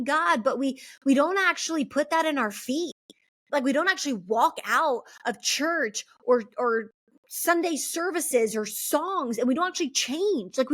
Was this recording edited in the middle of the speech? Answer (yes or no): no